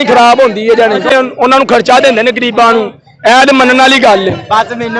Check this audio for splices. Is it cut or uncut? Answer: cut